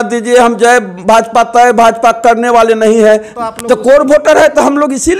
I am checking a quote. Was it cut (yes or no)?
yes